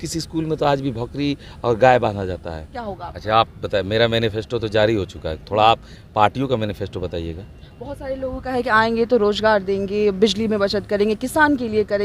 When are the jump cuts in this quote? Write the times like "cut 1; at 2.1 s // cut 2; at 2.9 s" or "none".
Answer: cut 1; at 2.9 s